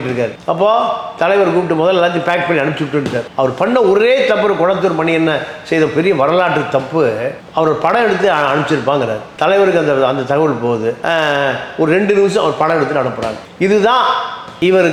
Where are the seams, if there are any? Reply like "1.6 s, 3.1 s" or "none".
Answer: none